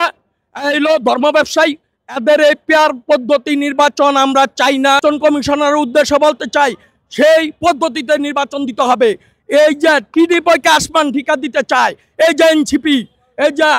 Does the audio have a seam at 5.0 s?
yes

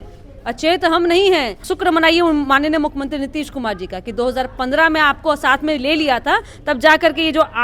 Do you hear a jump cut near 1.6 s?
yes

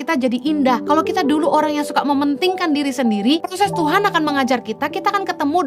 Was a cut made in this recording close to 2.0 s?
no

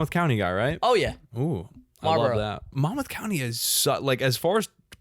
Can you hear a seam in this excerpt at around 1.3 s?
no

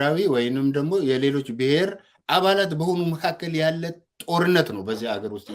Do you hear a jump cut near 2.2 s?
no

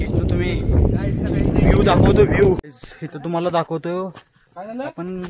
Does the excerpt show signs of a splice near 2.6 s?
yes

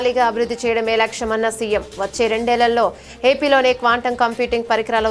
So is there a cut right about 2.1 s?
no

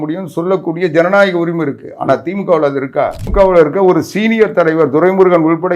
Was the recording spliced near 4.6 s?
no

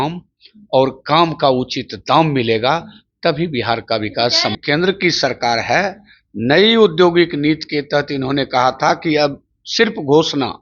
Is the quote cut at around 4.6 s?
yes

